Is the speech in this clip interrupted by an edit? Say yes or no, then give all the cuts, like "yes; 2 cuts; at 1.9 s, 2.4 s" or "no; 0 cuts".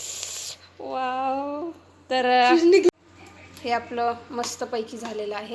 yes; 1 cut; at 2.9 s